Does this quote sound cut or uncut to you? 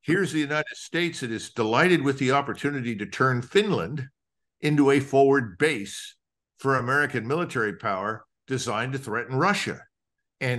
uncut